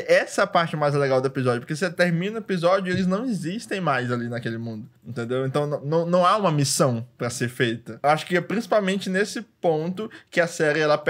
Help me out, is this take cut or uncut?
cut